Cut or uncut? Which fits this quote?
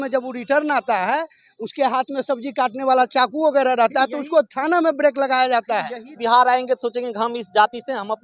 cut